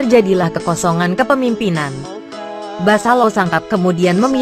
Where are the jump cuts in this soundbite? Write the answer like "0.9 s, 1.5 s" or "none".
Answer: 2.6 s